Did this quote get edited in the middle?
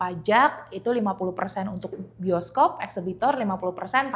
no; 0 cuts

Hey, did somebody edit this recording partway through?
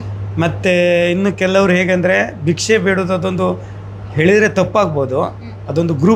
no; 0 cuts

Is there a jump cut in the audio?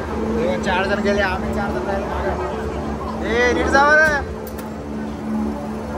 no; 0 cuts

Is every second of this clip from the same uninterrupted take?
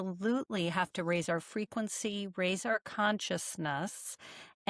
yes; 0 cuts

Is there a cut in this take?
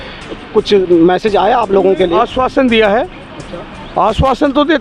no; 0 cuts

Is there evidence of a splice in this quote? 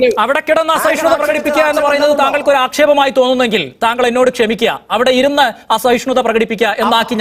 no; 0 cuts

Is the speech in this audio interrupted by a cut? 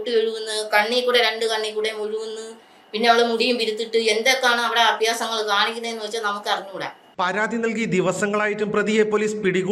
no; 0 cuts

